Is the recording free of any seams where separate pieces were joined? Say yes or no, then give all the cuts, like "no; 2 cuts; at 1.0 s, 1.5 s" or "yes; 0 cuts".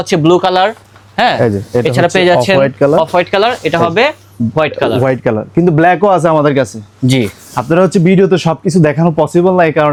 yes; 0 cuts